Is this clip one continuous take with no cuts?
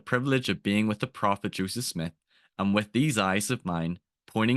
yes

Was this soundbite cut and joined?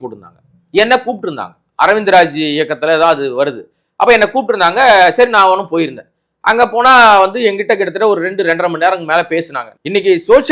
yes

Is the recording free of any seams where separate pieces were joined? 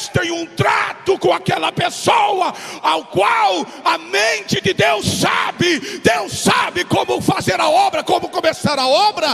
yes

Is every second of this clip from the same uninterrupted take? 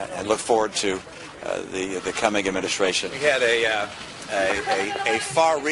no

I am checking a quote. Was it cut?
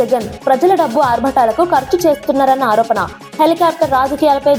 no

